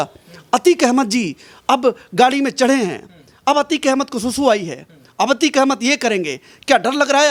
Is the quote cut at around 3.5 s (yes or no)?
no